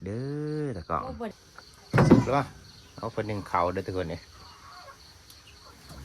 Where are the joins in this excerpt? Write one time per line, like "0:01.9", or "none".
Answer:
0:01.3